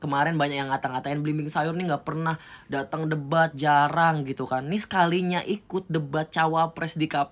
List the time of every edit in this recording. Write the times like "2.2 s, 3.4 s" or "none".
none